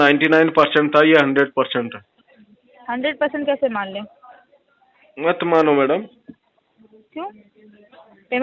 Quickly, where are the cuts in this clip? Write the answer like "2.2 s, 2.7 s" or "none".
none